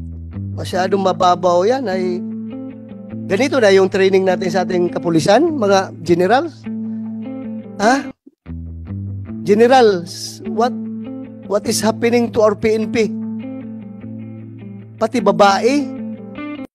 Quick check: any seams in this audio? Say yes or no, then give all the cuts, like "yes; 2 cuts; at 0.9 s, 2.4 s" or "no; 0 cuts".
no; 0 cuts